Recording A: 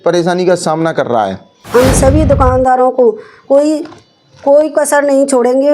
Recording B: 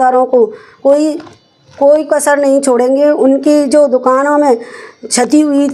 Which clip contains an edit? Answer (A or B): A